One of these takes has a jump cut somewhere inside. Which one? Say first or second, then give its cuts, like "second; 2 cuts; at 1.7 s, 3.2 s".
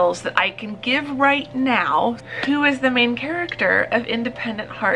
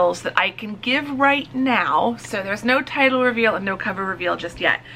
first; 1 cut; at 2.3 s